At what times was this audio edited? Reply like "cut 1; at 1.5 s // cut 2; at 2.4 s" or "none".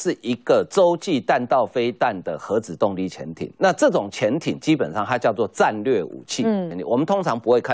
cut 1; at 6.7 s